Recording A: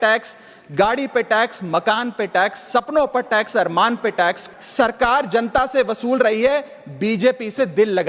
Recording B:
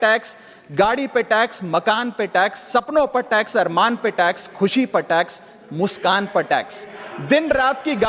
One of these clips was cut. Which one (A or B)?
A